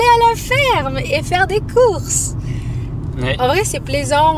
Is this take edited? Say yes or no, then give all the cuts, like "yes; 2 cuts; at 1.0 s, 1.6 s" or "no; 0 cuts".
no; 0 cuts